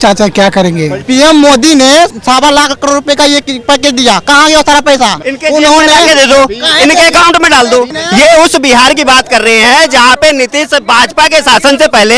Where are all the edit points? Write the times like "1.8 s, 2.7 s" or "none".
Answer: 1.0 s, 2.1 s, 5.3 s, 8.0 s